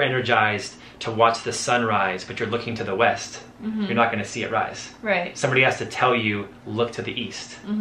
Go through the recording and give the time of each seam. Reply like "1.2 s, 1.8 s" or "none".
none